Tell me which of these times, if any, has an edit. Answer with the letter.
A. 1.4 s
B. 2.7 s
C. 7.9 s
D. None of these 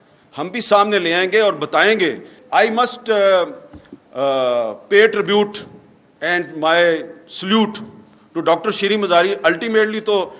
B